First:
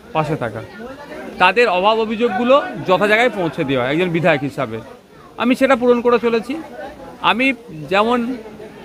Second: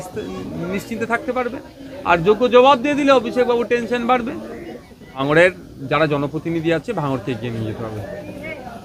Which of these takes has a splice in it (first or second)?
second